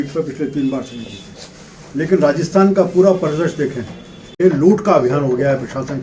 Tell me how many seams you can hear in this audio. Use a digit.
1